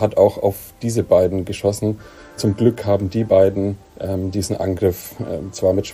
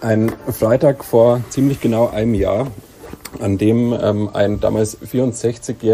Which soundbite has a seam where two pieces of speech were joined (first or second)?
first